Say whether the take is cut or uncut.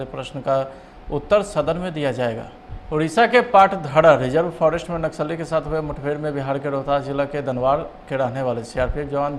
cut